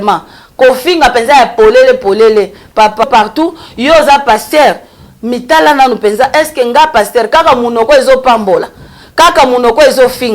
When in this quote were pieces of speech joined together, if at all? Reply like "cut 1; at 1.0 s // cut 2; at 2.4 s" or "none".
cut 1; at 3.0 s